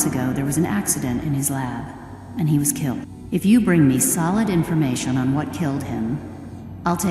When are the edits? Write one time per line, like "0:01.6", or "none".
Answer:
0:03.1